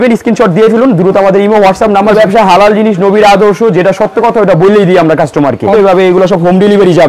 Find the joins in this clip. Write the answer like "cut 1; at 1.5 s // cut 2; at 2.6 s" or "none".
cut 1; at 2.1 s // cut 2; at 5.7 s